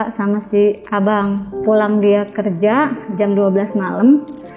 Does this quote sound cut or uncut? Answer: cut